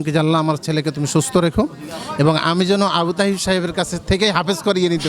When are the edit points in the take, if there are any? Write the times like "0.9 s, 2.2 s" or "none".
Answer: none